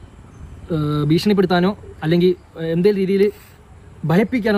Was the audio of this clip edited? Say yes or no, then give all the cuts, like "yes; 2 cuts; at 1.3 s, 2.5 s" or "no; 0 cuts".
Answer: no; 0 cuts